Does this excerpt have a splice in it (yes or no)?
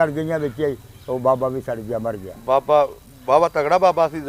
no